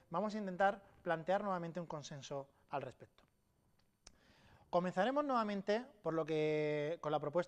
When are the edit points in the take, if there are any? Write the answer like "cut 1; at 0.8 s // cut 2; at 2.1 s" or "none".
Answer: none